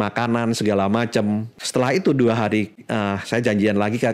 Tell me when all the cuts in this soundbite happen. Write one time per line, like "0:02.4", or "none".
0:01.6